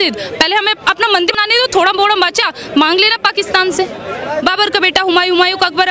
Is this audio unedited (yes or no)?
no